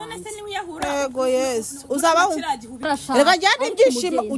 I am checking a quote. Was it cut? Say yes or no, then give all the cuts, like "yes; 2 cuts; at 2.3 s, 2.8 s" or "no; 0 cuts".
yes; 1 cut; at 2.9 s